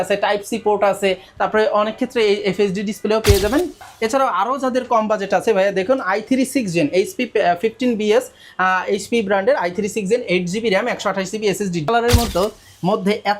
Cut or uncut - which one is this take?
cut